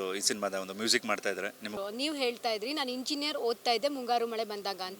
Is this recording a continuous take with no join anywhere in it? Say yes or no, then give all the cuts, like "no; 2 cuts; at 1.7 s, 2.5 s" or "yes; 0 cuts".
no; 1 cut; at 1.7 s